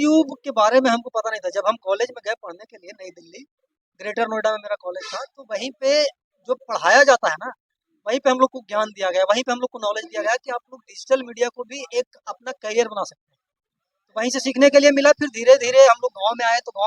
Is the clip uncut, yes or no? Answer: yes